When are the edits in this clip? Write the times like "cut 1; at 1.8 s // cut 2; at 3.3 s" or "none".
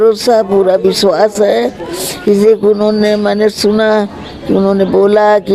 none